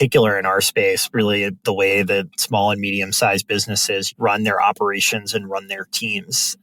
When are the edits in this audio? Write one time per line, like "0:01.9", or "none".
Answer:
none